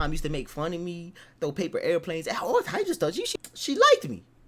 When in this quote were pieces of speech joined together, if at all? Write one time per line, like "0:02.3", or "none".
0:03.2